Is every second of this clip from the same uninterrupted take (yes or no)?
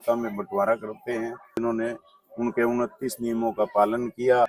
no